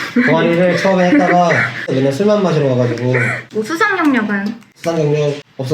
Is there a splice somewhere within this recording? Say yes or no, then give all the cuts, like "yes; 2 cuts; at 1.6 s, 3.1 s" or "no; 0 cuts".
yes; 1 cut; at 3.5 s